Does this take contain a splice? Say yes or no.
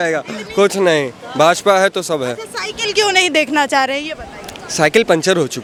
no